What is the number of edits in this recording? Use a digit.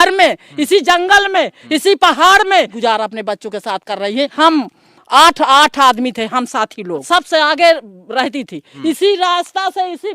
4